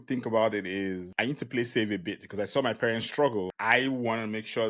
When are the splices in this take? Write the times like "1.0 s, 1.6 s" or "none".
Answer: 1.1 s, 3.5 s

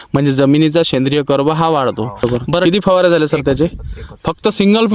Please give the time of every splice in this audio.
2.2 s

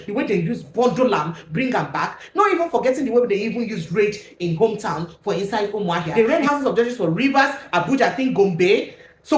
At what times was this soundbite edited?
6.1 s

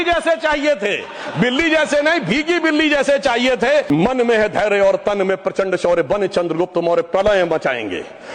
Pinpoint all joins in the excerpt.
3.9 s

